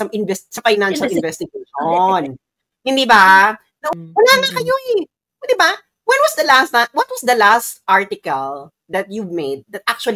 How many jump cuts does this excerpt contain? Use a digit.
1